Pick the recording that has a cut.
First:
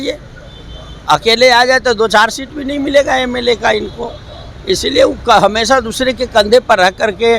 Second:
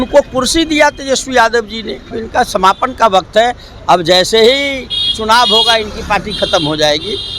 second; 1 cut; at 2.2 s

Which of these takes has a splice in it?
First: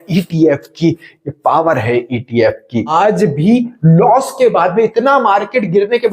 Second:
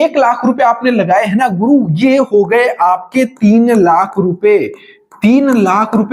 first; 1 cut; at 2.9 s

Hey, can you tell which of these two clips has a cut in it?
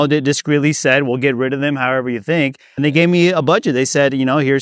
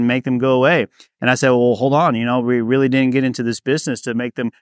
first; 1 cut; at 2.8 s

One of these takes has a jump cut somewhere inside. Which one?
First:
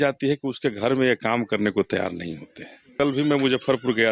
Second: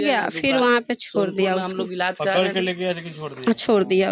first; 1 cut; at 2.9 s

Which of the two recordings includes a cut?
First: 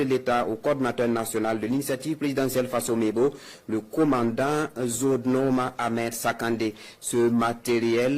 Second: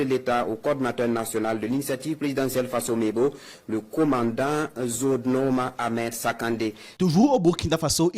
second; 1 cut; at 6.9 s

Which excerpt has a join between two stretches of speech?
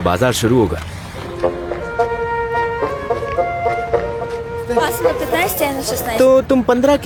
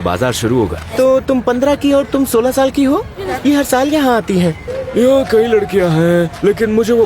second; 3 cuts; at 0.8 s, 3.2 s, 4.7 s

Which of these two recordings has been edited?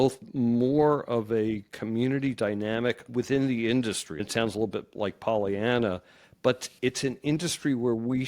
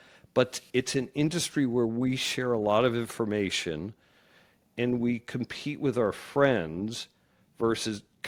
first; 2 cuts; at 3.1 s, 4.1 s

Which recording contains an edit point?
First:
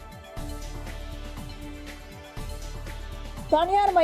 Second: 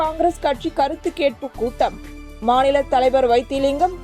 first; 2 cuts; at 1.3 s, 3.2 s

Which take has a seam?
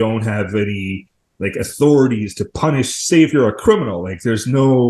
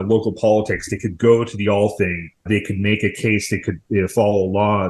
second; 1 cut; at 2.5 s

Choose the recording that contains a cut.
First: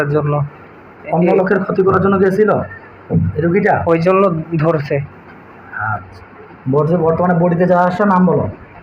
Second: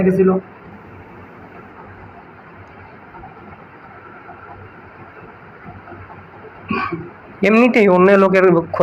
first; 1 cut; at 6.1 s

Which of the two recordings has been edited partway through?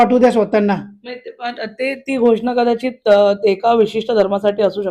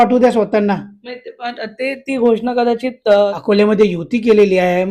second; 1 cut; at 3.3 s

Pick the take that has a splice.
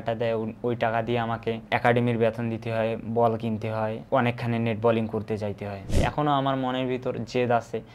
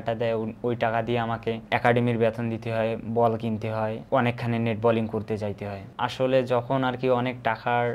first; 1 cut; at 5.8 s

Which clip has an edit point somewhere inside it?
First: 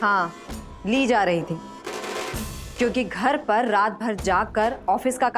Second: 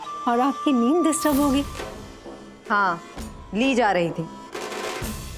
second; 1 cut; at 1.7 s

